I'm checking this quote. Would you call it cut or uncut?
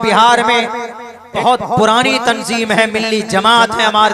cut